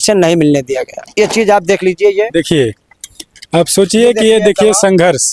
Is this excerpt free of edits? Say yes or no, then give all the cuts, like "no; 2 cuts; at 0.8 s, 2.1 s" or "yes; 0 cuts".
no; 1 cut; at 1.0 s